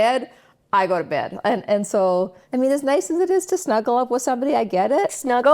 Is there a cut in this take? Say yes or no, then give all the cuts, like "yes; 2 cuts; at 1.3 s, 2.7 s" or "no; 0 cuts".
yes; 1 cut; at 2.4 s